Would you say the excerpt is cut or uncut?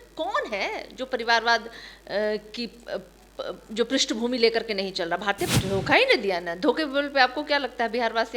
cut